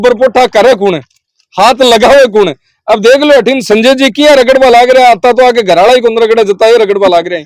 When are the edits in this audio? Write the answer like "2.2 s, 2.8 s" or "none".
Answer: none